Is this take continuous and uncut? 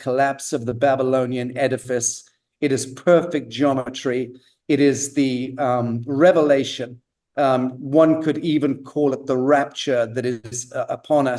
yes; 0 cuts

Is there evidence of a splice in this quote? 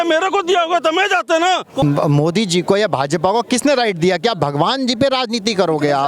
yes; 1 cut; at 1.8 s

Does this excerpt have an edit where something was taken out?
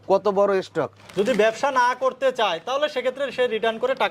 yes; 1 cut; at 1.0 s

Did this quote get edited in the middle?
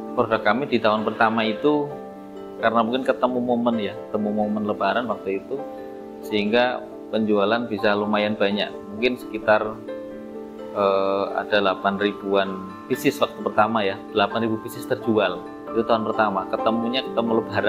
no; 0 cuts

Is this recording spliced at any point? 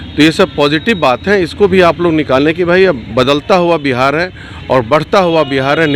no; 0 cuts

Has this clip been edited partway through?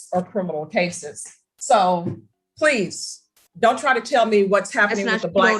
no; 0 cuts

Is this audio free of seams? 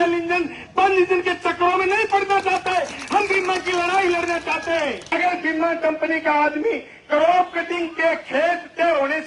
no; 1 cut; at 5.1 s

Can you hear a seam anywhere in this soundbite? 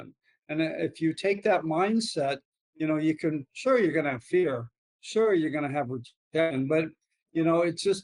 no; 0 cuts

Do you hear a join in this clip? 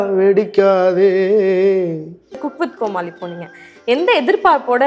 yes; 1 cut; at 2.4 s

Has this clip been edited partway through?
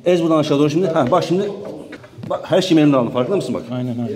no; 0 cuts

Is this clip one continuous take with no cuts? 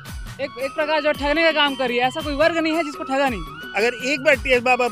no; 1 cut; at 3.6 s

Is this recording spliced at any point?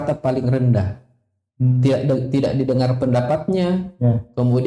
no; 0 cuts

